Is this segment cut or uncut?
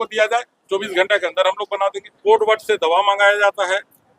cut